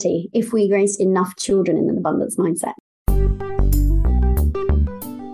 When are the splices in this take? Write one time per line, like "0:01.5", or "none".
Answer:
0:02.8